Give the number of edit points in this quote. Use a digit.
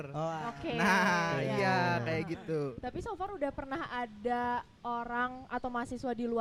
0